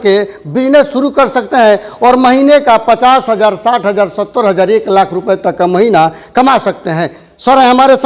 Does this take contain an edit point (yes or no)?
no